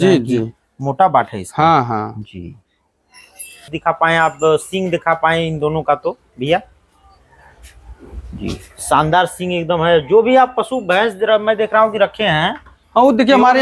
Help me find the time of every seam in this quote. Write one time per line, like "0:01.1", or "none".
0:03.7